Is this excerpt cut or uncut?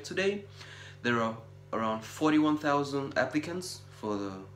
uncut